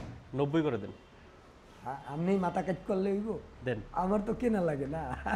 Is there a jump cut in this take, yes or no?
no